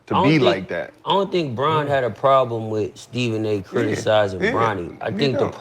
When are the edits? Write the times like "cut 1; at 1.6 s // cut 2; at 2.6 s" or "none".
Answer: none